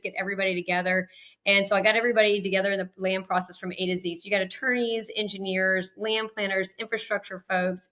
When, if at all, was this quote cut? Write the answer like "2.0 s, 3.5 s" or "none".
none